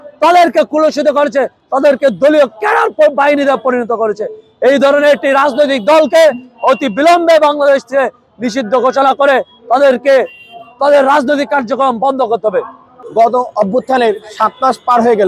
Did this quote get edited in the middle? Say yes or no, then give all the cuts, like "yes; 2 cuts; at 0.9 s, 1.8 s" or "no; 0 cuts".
no; 0 cuts